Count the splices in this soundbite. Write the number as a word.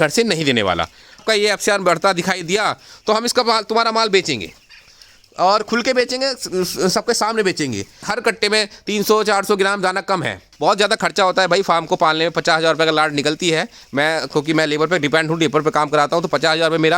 three